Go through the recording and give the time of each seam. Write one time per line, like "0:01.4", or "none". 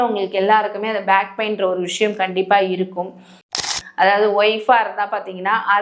0:03.6

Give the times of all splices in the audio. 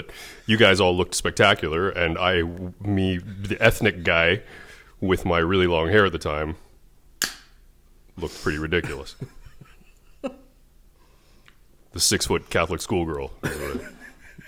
none

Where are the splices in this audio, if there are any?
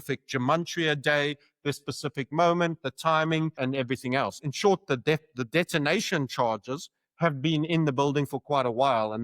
0:03.6

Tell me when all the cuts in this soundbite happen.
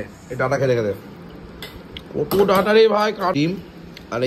0:03.3

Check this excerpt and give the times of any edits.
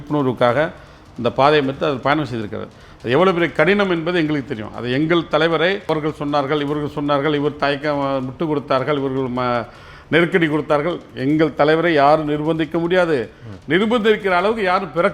0:05.9

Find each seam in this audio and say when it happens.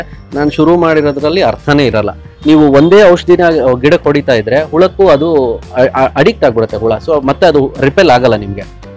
0:02.3

